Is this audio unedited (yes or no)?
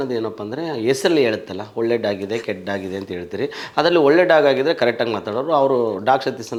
yes